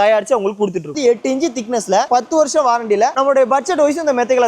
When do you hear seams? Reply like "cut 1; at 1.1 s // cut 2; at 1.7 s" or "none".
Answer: cut 1; at 0.9 s // cut 2; at 2.1 s